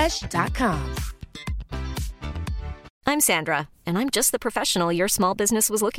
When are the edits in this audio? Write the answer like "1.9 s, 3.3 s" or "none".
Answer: 2.9 s

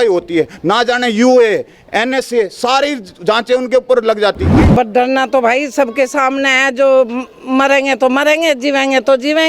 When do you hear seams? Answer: 4.5 s

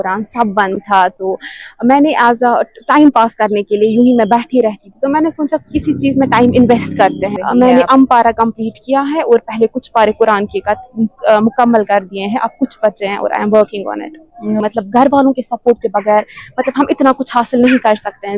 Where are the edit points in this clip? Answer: 7.3 s, 14.4 s

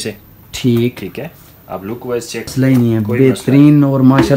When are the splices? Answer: 2.5 s

